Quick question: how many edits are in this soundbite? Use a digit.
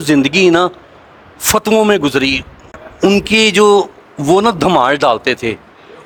0